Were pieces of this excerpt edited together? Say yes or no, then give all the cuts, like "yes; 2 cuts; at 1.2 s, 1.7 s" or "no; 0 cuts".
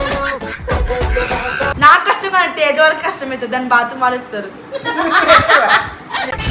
yes; 1 cut; at 1.8 s